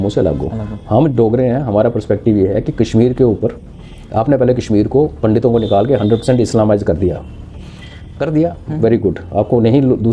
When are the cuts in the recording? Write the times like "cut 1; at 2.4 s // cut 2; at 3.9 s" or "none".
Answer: none